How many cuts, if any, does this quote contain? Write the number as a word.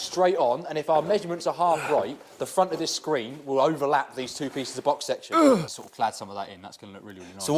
one